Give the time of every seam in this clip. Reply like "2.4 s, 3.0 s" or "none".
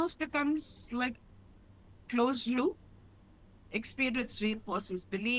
1.1 s